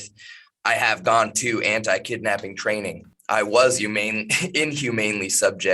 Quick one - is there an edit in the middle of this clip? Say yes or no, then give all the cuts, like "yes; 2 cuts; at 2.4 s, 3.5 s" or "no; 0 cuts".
yes; 1 cut; at 3.1 s